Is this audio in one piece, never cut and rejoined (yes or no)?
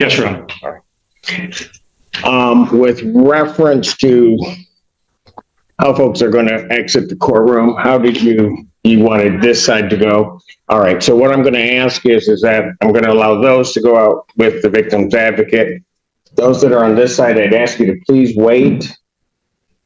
yes